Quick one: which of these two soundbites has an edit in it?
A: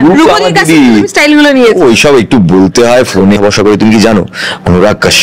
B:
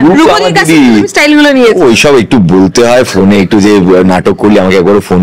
A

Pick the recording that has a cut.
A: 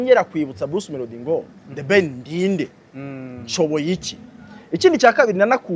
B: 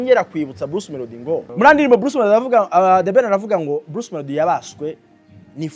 B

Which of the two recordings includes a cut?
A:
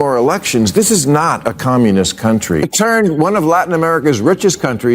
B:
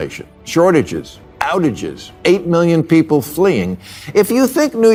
A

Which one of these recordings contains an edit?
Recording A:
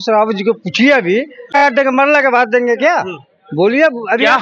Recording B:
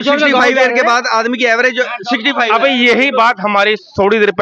A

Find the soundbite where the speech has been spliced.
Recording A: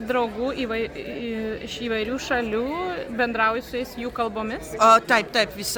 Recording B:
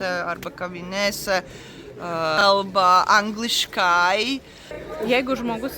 B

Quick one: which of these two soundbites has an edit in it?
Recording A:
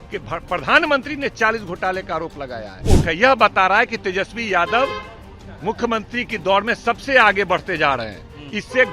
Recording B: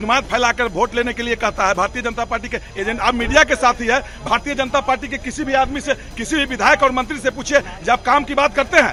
A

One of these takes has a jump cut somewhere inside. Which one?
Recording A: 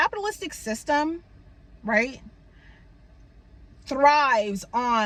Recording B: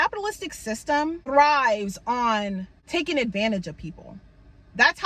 B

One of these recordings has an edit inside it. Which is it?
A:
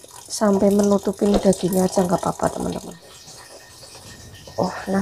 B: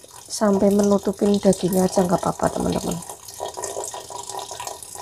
A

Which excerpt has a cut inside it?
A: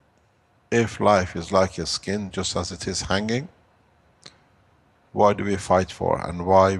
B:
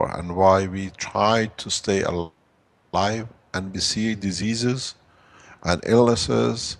A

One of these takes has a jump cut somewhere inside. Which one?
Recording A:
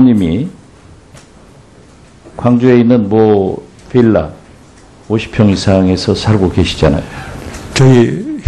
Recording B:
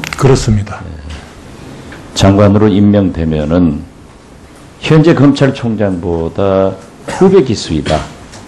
A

